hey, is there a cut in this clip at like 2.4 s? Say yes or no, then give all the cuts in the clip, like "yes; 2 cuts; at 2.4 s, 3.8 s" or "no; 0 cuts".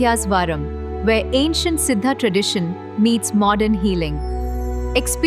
no; 0 cuts